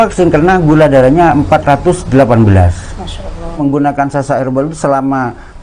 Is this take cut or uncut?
cut